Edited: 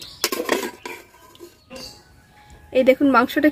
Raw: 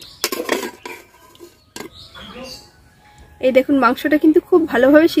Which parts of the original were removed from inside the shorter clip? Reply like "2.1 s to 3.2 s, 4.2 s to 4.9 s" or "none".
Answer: 1.7 s to 2.4 s